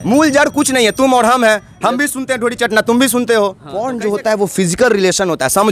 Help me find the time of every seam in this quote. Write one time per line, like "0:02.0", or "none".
0:03.9